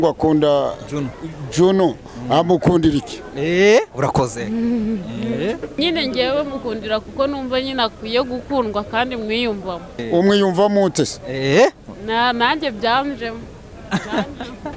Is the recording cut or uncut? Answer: cut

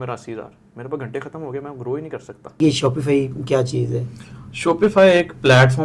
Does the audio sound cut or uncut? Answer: cut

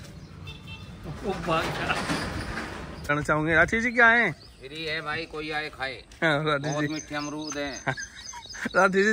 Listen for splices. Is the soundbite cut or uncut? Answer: cut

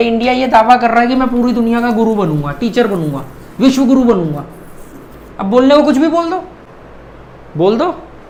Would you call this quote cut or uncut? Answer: uncut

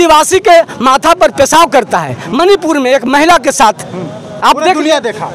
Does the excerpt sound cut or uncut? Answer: uncut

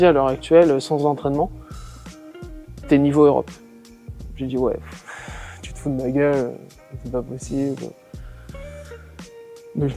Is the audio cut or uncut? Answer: uncut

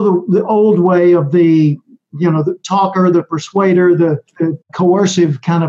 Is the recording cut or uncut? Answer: cut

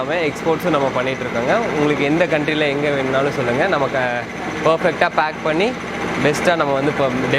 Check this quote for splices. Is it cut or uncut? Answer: uncut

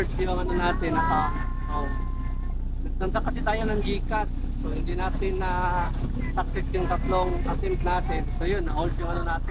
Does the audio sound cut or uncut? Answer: uncut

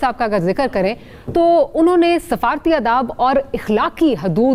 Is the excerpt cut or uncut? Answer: uncut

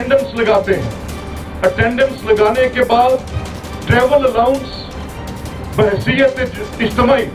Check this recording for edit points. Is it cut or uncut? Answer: uncut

